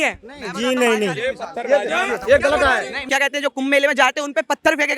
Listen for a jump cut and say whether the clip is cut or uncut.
cut